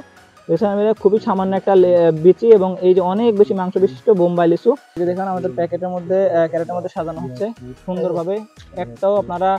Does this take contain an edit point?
yes; 1 cut; at 4.9 s

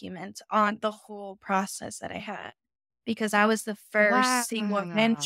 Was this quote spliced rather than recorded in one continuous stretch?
no; 0 cuts

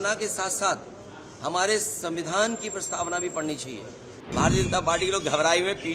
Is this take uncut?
no; 1 cut; at 4.2 s

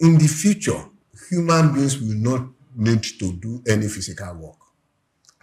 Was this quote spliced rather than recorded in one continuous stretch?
no; 0 cuts

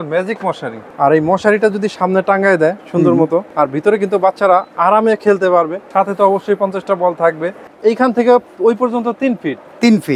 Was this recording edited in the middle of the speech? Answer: yes; 4 cuts; at 0.8 s, 3.5 s, 5.8 s, 7.6 s

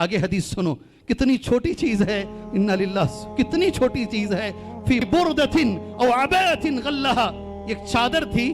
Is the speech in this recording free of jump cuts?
no; 1 cut; at 5.1 s

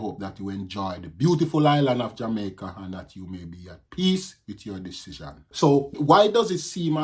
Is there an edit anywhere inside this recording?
yes; 1 cut; at 5.5 s

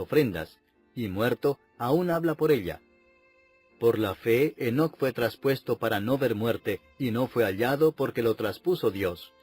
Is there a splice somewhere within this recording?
yes; 1 cut; at 8.0 s

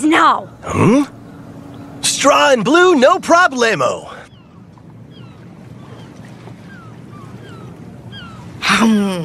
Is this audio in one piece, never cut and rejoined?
no; 1 cut; at 3.7 s

